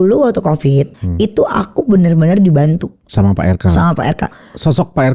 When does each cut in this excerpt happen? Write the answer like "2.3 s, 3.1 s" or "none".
1.0 s, 3.0 s, 4.2 s